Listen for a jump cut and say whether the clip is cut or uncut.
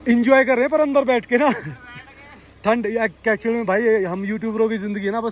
uncut